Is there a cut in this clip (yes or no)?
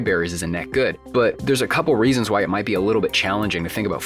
yes